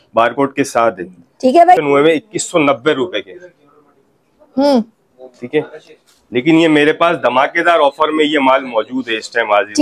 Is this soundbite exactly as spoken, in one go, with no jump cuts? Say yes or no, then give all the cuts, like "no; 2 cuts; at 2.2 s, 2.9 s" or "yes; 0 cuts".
no; 1 cut; at 1.8 s